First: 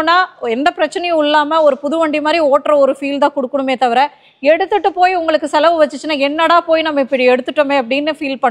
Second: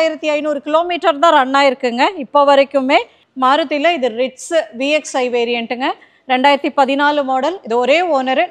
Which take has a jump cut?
second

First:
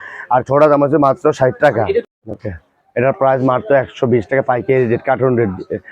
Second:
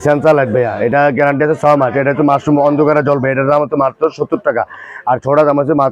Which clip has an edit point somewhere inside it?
first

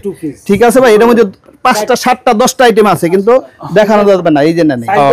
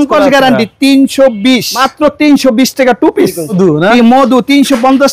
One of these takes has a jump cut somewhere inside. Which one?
second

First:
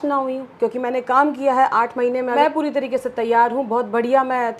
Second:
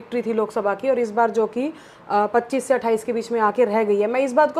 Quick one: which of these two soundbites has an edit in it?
first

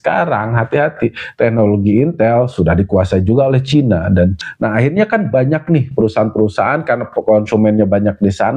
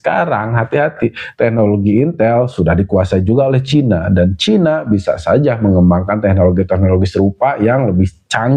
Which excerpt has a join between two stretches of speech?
first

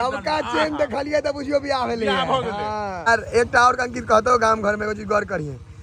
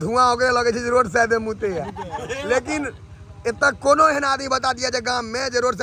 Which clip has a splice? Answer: first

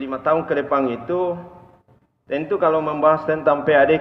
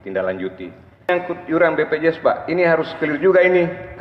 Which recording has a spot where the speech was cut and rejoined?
second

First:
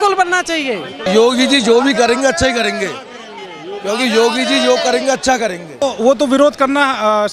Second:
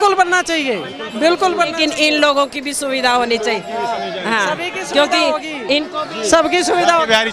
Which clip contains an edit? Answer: first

